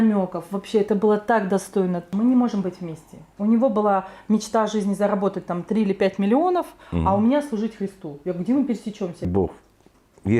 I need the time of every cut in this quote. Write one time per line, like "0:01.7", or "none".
0:02.1
0:09.3